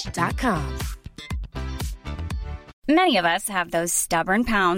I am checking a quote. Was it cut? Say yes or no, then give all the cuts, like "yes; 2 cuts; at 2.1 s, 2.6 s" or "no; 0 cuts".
yes; 1 cut; at 2.7 s